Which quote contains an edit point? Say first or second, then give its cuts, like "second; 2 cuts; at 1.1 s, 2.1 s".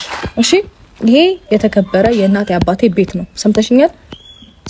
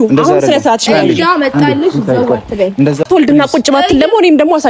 second; 1 cut; at 3.1 s